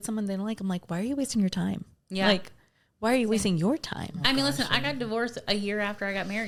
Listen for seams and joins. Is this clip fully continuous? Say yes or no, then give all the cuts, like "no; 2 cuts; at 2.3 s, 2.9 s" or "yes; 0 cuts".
yes; 0 cuts